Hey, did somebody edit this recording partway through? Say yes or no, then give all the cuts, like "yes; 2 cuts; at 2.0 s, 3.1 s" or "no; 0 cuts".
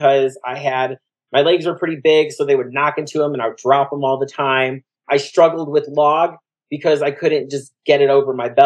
yes; 1 cut; at 5.1 s